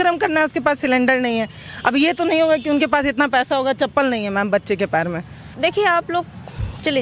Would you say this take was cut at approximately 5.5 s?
yes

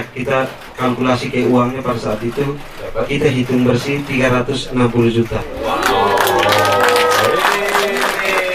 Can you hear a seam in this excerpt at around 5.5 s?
yes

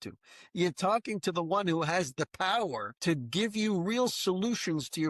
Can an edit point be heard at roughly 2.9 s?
yes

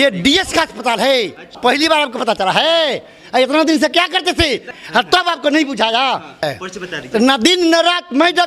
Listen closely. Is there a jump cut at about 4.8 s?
yes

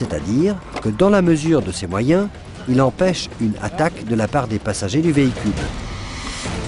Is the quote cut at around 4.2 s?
no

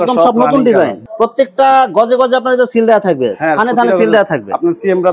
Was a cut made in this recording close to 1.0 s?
yes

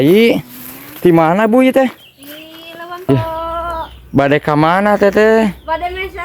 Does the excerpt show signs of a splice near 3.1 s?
yes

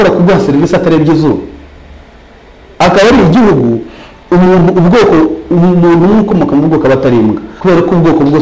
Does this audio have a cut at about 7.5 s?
yes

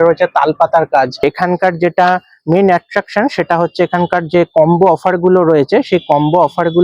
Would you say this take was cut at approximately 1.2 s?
yes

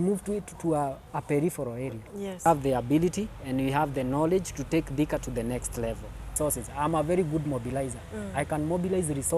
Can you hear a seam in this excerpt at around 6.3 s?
yes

